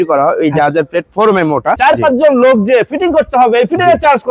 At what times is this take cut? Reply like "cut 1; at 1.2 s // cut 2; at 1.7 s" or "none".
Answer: cut 1; at 1.8 s